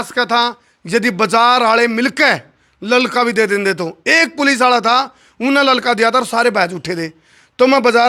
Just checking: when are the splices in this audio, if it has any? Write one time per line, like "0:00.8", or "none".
none